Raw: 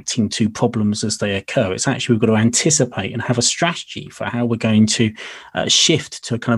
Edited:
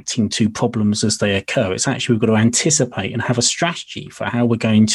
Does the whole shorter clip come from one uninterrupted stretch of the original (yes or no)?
yes